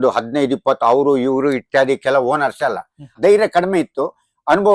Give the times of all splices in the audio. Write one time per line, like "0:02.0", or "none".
0:03.0